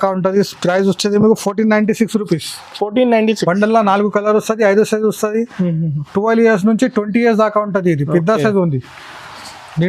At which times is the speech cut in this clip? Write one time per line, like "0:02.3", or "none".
none